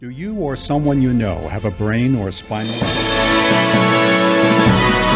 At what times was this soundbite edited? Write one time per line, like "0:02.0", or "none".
0:02.6